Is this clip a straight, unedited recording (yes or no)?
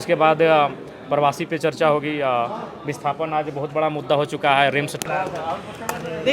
no